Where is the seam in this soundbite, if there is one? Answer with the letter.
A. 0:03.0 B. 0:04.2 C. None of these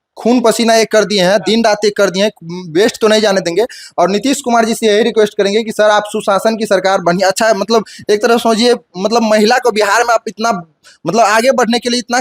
C